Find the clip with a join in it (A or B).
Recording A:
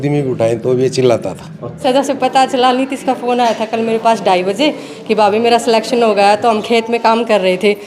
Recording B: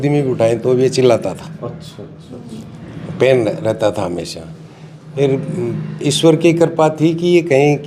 A